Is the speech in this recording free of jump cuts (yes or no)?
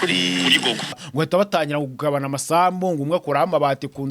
no